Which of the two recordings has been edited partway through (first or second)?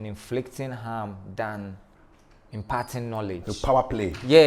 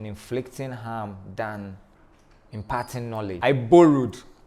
second